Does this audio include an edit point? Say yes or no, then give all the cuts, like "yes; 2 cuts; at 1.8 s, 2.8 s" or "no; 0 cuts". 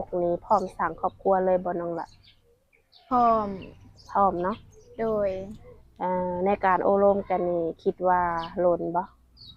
no; 0 cuts